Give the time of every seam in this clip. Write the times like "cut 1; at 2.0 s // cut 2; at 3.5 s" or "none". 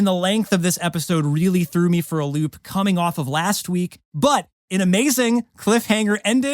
cut 1; at 4.0 s